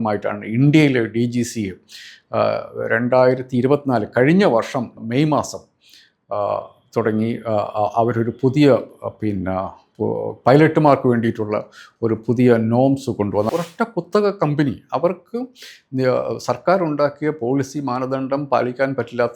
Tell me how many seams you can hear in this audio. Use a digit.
1